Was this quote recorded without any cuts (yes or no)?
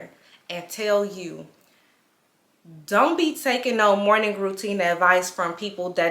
yes